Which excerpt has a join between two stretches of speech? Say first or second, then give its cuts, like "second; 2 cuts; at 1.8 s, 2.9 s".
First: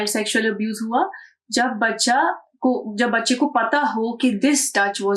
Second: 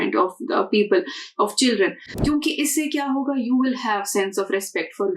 second; 1 cut; at 2.1 s